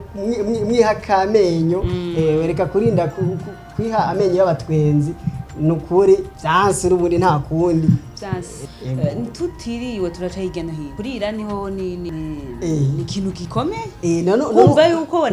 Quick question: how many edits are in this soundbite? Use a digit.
5